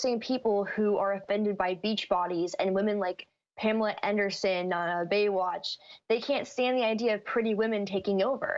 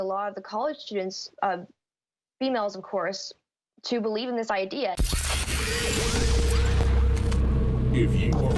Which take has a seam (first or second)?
second